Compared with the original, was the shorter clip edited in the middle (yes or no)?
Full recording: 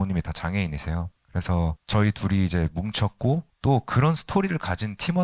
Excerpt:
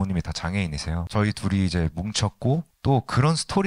yes